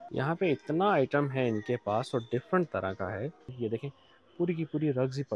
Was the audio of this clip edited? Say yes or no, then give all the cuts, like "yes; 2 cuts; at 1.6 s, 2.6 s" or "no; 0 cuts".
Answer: yes; 1 cut; at 3.5 s